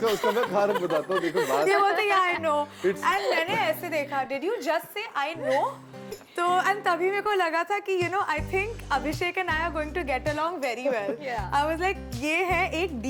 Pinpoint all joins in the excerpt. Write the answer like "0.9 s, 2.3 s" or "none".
none